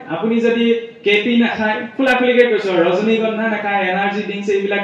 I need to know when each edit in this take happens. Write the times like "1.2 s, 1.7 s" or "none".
none